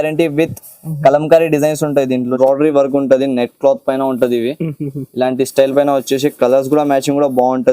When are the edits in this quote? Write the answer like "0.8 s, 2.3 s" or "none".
2.4 s